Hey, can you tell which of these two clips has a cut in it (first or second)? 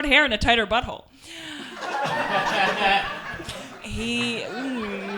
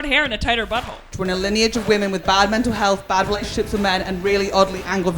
second